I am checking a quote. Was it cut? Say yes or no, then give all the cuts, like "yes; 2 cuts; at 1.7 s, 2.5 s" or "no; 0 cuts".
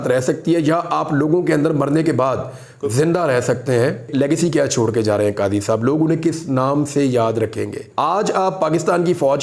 yes; 2 cuts; at 4.1 s, 7.8 s